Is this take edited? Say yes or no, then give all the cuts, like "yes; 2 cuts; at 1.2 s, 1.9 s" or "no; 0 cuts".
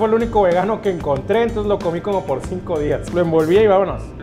yes; 1 cut; at 3.0 s